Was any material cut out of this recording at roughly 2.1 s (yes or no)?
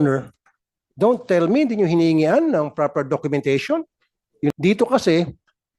no